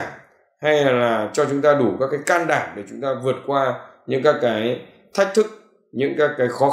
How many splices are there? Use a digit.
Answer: 0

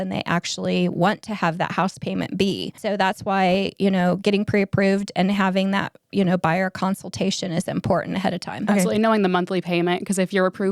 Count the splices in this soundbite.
2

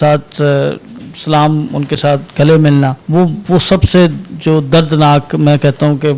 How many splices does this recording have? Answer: 1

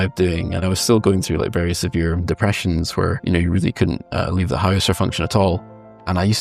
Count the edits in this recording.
2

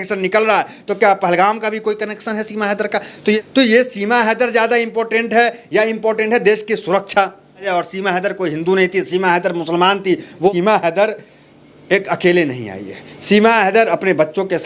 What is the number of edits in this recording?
3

